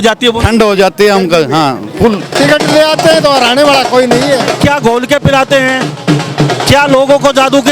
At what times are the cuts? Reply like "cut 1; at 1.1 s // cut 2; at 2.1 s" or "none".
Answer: cut 1; at 2.3 s // cut 2; at 4.6 s